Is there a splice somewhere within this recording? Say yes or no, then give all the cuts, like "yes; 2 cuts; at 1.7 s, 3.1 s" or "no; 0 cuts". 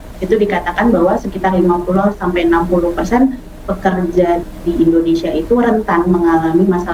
no; 0 cuts